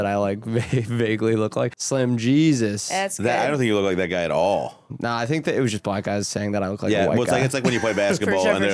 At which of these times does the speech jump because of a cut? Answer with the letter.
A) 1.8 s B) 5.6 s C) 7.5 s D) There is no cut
A